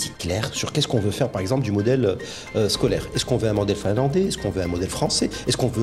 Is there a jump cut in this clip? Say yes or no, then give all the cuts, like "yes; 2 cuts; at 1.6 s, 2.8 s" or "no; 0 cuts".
no; 0 cuts